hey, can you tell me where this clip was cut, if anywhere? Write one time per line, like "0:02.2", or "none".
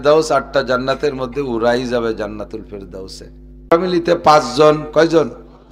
0:03.6